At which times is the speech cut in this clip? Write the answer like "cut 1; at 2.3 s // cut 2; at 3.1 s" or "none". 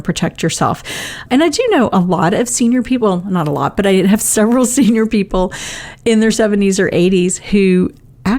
cut 1; at 1.2 s